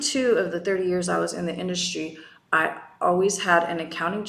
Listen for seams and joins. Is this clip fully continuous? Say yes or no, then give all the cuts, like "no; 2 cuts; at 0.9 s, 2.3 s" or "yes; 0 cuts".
yes; 0 cuts